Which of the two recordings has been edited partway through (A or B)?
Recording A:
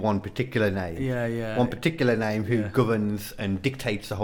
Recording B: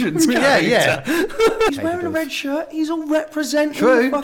B